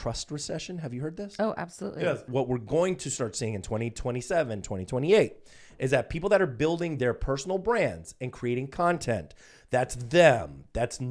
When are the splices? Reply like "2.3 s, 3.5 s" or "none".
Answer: 2.3 s